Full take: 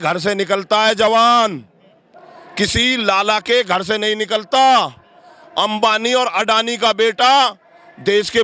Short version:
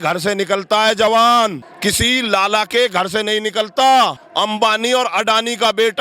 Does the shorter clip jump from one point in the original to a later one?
yes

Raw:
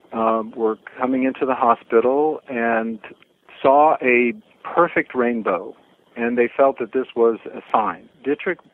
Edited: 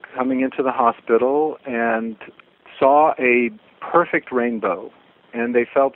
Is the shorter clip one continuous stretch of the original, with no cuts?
yes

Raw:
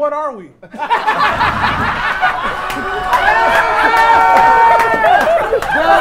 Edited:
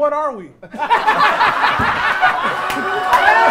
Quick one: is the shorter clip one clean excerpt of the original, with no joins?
yes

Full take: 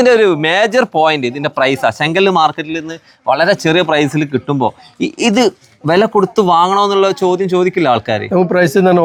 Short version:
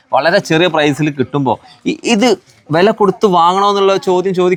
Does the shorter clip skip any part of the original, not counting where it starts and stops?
no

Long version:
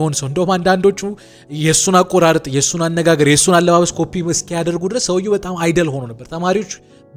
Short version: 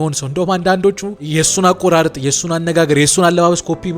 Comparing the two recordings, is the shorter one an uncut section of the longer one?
no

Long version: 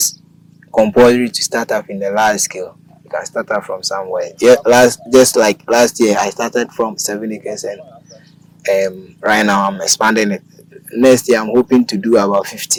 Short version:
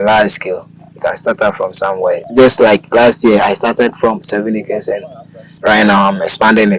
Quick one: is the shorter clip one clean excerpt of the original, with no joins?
no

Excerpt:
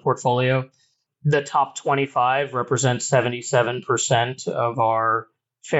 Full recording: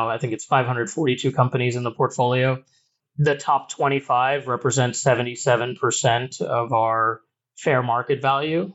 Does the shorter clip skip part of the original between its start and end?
no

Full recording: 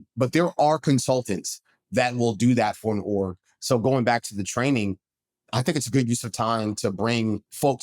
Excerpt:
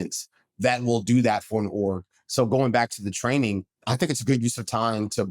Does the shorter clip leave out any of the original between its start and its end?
yes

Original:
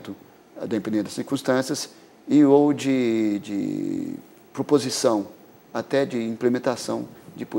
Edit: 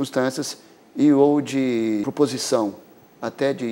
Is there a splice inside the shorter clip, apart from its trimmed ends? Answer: yes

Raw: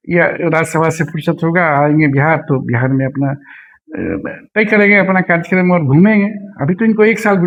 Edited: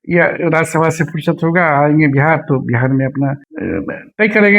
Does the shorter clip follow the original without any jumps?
no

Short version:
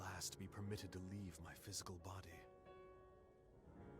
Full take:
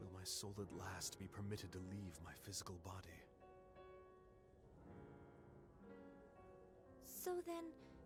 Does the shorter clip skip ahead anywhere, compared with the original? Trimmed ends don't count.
yes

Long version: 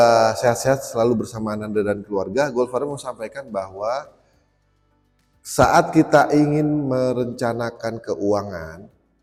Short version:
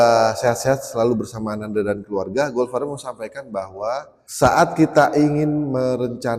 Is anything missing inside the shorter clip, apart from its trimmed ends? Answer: yes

